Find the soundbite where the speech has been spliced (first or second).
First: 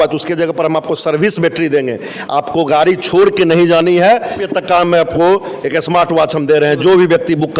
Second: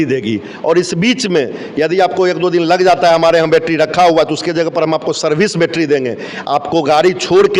first